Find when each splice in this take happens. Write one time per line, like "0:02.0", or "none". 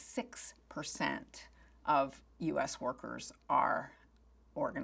none